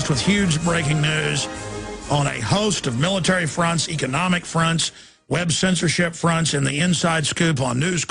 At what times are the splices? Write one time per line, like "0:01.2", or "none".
0:03.1